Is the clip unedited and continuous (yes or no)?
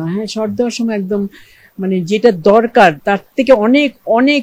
no